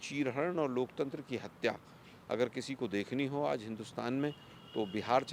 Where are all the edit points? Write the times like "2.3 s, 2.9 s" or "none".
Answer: none